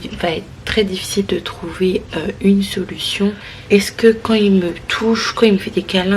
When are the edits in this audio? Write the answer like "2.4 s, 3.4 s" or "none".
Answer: 3.5 s